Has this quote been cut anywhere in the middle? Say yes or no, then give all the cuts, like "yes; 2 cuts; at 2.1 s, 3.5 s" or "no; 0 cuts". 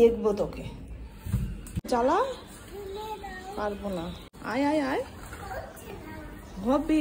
no; 0 cuts